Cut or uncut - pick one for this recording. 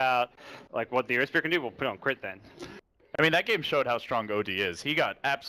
uncut